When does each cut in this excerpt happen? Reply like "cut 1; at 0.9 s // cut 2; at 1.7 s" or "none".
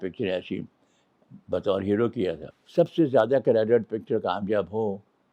cut 1; at 2.5 s